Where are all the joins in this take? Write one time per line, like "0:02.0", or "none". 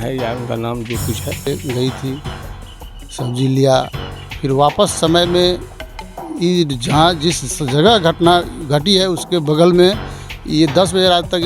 0:01.5